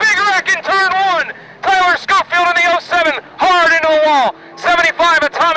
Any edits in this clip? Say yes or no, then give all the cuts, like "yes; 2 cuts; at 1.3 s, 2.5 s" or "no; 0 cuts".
no; 0 cuts